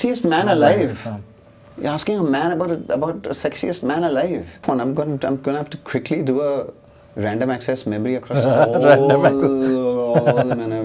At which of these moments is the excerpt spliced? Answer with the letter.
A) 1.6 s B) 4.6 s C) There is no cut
B